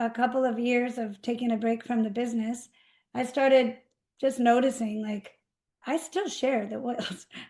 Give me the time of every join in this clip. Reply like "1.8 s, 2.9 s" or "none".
none

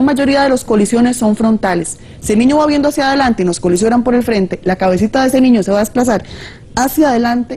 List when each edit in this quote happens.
5.5 s

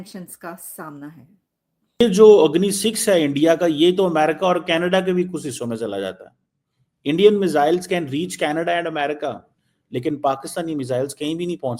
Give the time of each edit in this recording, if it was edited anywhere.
2.0 s

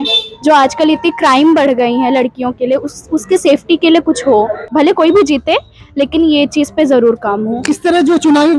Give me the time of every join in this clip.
4.6 s, 7.6 s

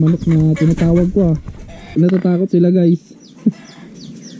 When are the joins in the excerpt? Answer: 1.9 s

